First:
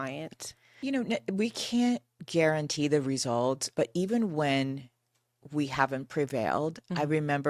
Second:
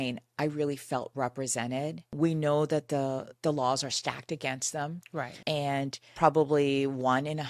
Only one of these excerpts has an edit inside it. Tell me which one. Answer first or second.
second